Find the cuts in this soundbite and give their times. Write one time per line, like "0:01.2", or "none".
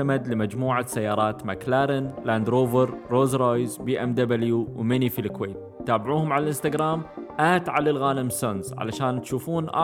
none